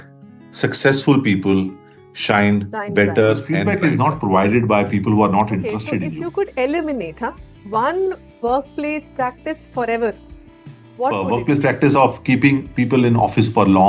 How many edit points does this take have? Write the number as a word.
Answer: three